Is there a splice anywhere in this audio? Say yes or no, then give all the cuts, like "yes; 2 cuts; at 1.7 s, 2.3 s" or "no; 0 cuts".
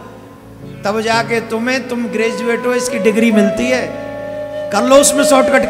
no; 0 cuts